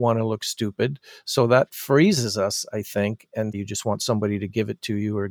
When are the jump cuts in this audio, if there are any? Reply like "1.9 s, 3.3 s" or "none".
3.6 s